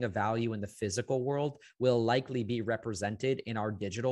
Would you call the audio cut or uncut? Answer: uncut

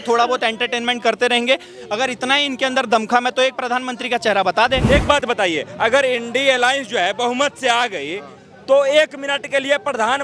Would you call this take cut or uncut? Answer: cut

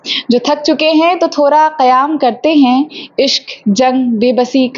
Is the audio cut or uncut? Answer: uncut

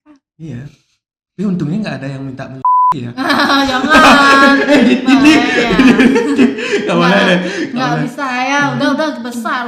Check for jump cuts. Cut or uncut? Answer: uncut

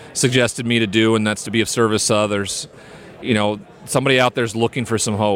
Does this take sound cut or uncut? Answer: cut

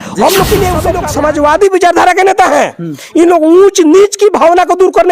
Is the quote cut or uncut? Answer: cut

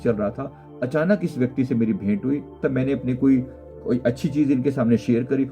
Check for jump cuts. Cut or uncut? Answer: cut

